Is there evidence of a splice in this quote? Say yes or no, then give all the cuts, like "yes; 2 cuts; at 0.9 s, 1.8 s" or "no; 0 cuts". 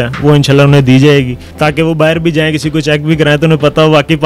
yes; 1 cut; at 1.4 s